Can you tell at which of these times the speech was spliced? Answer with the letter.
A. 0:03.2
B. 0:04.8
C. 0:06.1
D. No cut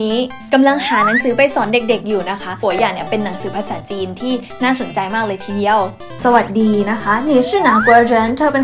C